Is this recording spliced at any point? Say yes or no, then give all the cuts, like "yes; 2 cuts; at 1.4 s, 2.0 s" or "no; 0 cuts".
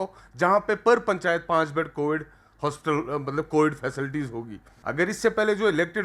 yes; 1 cut; at 4.8 s